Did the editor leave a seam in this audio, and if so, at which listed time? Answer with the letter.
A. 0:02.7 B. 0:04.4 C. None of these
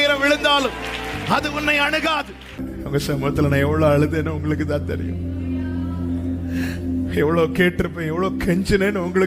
A